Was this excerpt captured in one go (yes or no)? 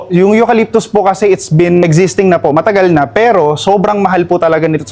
no